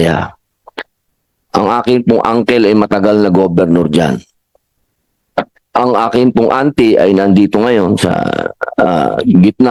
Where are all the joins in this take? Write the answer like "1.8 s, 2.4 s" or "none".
none